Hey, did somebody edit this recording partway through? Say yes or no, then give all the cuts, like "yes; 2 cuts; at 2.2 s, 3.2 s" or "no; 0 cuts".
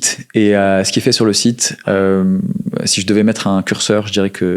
no; 0 cuts